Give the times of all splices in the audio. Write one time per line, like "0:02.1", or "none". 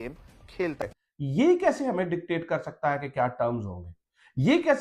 0:00.9